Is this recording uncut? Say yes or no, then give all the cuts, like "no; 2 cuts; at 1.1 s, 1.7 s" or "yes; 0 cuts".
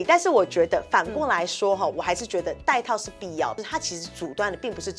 no; 1 cut; at 3.6 s